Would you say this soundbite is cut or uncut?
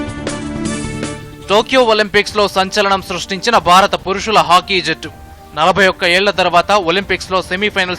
cut